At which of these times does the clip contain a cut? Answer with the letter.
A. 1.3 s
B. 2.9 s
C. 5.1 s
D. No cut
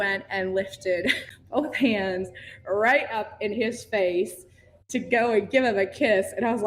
A